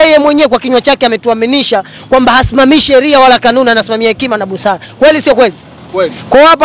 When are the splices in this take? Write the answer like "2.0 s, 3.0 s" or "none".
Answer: none